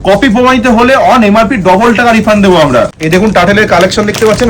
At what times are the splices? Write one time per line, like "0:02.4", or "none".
0:03.0